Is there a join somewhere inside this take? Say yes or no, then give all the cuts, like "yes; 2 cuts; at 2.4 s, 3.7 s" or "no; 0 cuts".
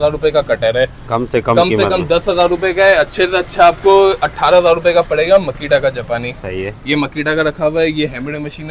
no; 0 cuts